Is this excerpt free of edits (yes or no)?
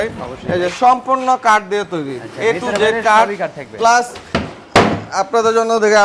yes